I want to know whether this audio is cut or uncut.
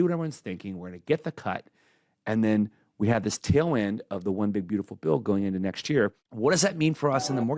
cut